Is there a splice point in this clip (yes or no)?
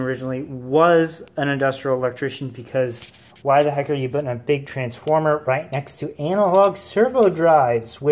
no